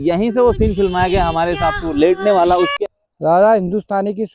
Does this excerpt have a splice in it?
yes; 1 cut; at 2.7 s

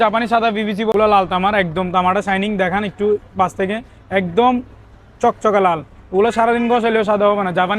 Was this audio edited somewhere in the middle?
yes; 1 cut; at 0.9 s

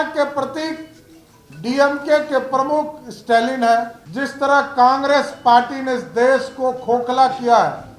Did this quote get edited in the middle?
yes; 1 cut; at 4.0 s

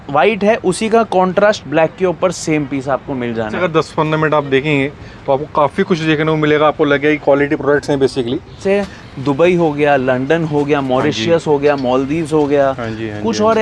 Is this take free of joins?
no; 2 cuts; at 3.6 s, 8.6 s

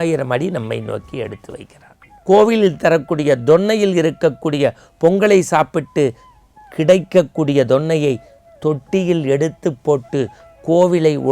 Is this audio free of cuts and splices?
no; 1 cut; at 2.1 s

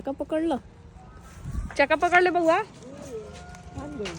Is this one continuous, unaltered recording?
yes; 0 cuts

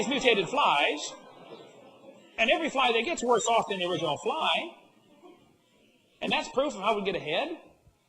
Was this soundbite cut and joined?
yes; 1 cut; at 6.3 s

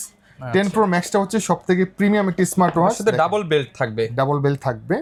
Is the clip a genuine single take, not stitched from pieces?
yes; 0 cuts

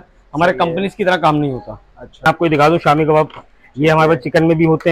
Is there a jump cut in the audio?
yes; 1 cut; at 2.3 s

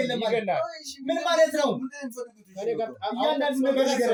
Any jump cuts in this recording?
no; 0 cuts

